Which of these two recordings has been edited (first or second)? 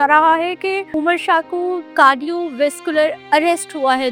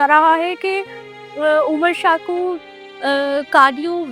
first